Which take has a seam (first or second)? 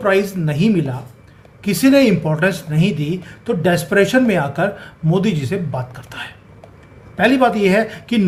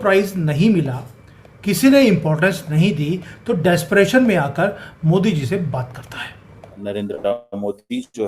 second